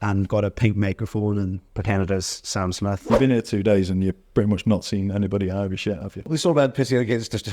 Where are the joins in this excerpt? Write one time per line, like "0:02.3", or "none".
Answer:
0:03.1
0:06.3